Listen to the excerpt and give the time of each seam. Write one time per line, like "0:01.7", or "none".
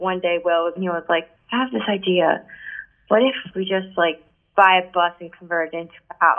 0:00.8
0:03.4